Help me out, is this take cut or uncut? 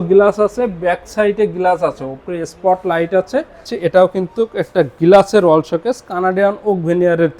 cut